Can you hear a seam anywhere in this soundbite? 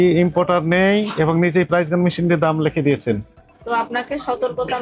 yes; 1 cut; at 3.3 s

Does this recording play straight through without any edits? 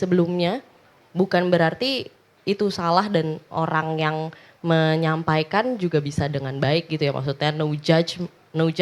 yes; 0 cuts

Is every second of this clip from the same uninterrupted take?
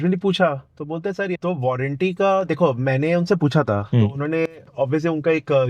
no; 1 cut; at 1.3 s

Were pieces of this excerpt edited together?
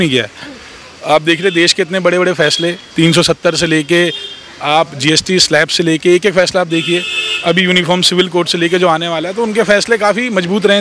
no; 0 cuts

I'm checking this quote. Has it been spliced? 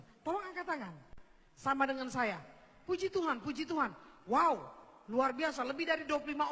no; 0 cuts

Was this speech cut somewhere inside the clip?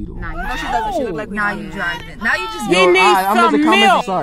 no; 0 cuts

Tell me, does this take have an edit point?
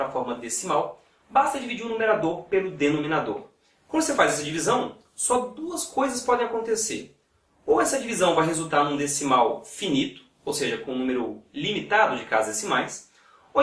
yes; 1 cut; at 6.7 s

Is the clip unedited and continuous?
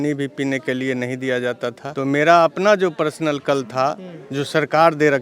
yes; 0 cuts

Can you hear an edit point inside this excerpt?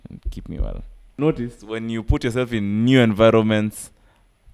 yes; 1 cut; at 1.1 s

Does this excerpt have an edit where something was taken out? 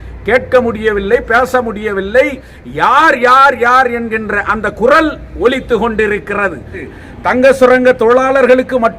yes; 1 cut; at 6.8 s

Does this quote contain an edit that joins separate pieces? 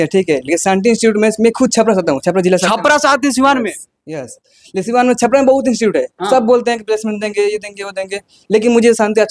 no; 0 cuts

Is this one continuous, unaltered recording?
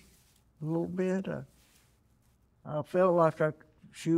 yes; 0 cuts

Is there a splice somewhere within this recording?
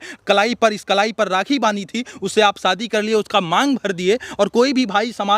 no; 0 cuts

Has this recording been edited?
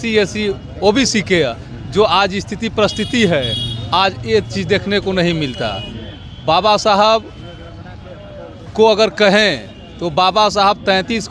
no; 0 cuts

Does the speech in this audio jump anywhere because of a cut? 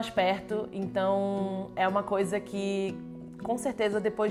no; 0 cuts

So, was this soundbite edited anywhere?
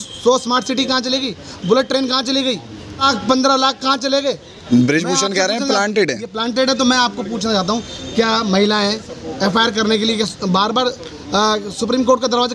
yes; 2 cuts; at 3.0 s, 4.5 s

